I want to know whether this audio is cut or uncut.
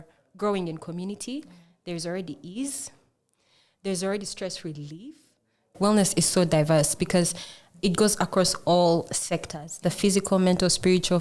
cut